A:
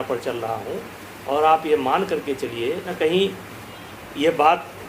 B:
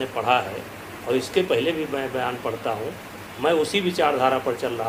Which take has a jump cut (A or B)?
A